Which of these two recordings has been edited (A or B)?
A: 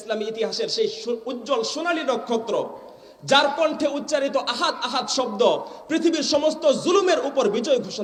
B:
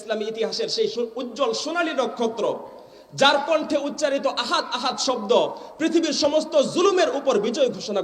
B